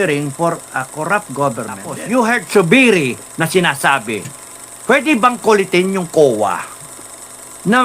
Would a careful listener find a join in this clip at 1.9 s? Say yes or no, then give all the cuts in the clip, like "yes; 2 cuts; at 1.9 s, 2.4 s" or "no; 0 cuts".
yes; 1 cut; at 1.9 s